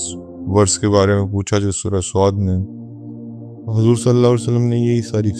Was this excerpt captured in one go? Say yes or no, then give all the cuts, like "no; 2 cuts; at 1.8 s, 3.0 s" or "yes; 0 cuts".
yes; 0 cuts